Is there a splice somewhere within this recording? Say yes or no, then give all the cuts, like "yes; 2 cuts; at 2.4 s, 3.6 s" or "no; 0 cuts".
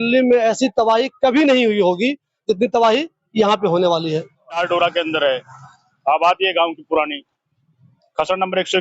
yes; 1 cut; at 4.6 s